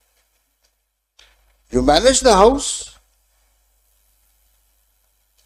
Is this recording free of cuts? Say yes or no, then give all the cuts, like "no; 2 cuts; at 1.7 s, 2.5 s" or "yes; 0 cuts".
yes; 0 cuts